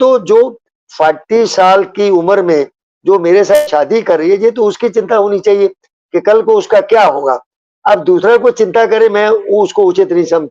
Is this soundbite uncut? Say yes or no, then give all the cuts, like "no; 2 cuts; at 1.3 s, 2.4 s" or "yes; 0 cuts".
yes; 0 cuts